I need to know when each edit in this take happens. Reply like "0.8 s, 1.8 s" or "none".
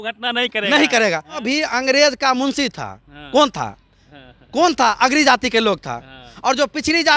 1.3 s